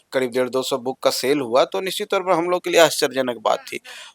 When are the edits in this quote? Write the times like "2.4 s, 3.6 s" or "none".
none